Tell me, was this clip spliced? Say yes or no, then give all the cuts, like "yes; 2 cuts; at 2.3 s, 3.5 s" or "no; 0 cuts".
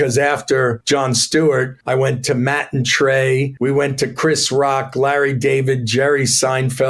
yes; 3 cuts; at 0.8 s, 1.8 s, 3.5 s